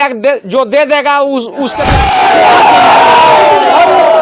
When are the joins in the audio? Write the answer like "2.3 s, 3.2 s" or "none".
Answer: 2.0 s